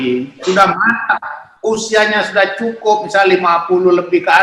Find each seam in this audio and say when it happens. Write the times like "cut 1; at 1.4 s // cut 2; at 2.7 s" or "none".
none